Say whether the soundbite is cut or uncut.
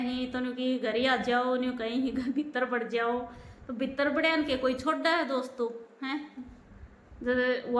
uncut